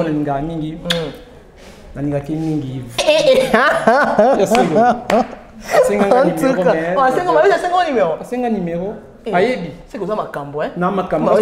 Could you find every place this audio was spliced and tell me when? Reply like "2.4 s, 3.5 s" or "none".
3.0 s